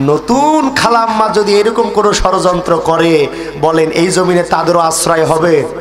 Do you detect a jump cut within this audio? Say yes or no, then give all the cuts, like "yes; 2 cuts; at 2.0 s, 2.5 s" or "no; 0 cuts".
no; 0 cuts